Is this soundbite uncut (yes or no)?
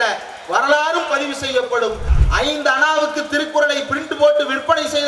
no